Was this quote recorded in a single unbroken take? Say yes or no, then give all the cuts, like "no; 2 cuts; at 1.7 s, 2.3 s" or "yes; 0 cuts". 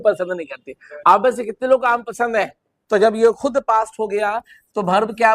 no; 1 cut; at 2.8 s